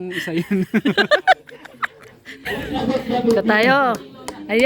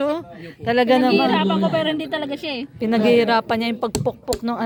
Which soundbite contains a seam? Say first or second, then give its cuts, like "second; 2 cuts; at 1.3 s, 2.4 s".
first; 1 cut; at 2.4 s